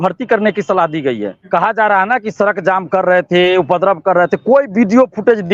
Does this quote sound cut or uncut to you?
cut